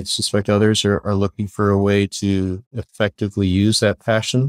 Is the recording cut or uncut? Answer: uncut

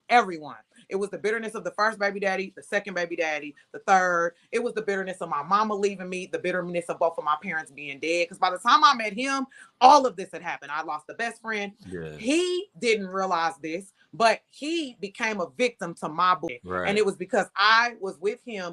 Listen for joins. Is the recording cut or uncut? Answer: cut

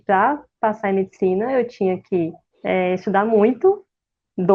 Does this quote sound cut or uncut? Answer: cut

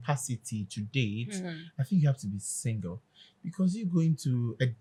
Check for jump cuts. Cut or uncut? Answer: uncut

